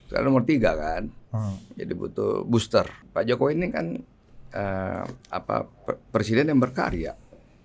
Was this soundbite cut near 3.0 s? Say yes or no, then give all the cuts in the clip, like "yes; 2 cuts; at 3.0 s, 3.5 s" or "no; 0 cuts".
yes; 1 cut; at 3.0 s